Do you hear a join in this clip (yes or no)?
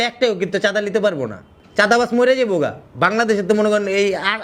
no